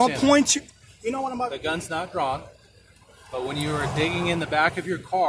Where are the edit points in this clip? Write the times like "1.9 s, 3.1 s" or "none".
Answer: none